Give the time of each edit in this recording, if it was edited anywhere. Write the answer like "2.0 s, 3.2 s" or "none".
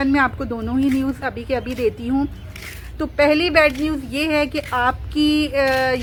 none